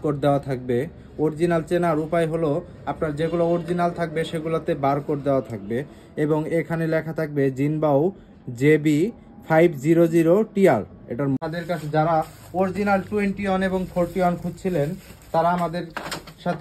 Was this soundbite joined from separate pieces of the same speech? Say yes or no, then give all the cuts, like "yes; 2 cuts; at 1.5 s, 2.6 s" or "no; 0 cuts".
yes; 1 cut; at 11.4 s